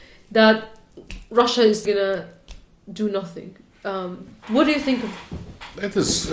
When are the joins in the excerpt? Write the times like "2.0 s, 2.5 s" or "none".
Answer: 1.8 s